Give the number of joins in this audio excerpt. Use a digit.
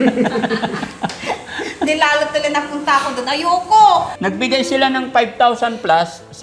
1